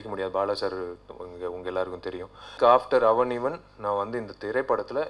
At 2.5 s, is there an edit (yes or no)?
yes